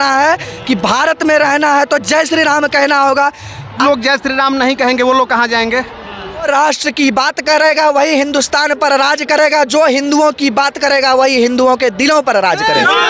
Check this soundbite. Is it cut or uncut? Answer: cut